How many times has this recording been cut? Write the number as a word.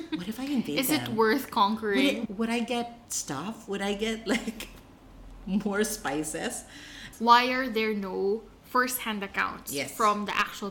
two